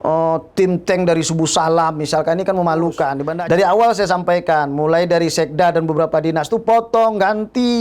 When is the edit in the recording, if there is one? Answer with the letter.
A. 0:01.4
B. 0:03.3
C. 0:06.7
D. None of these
B